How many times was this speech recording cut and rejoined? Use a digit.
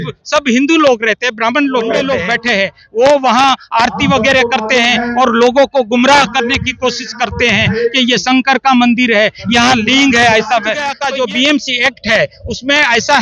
2